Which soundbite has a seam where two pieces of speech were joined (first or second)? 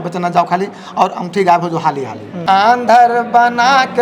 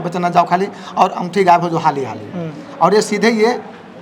first